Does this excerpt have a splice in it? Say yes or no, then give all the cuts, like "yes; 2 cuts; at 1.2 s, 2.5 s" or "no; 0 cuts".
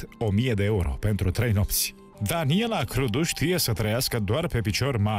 yes; 1 cut; at 2.0 s